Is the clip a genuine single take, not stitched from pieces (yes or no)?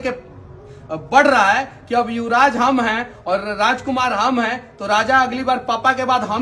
yes